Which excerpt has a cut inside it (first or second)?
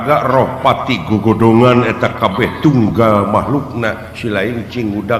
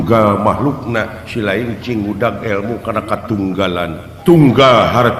second